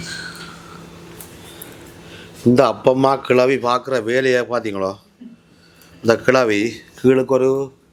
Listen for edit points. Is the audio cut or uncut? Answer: uncut